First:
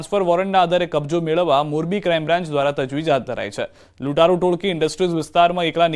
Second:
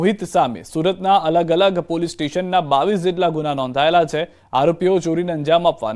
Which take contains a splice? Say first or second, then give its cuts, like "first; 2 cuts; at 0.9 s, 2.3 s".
first; 1 cut; at 4.6 s